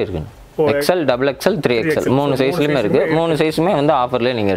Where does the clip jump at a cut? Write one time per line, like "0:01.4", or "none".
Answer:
none